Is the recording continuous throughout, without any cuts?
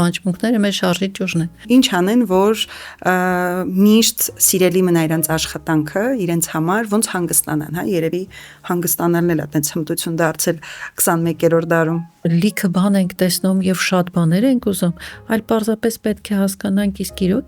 no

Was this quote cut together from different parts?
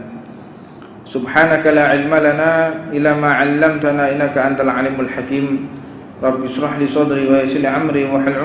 no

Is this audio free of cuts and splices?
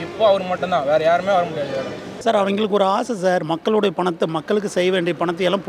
no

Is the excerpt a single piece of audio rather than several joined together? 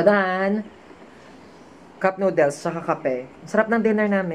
yes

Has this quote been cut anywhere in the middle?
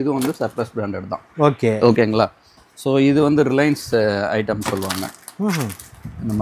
no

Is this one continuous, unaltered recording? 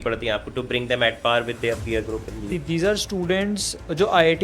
no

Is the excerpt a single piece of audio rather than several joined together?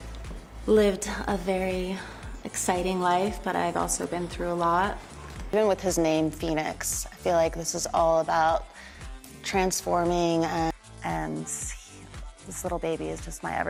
yes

